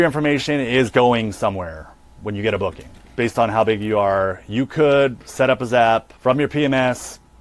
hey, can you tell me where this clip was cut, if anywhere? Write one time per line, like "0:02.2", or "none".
0:03.0
0:06.1